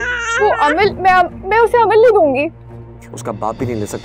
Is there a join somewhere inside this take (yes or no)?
yes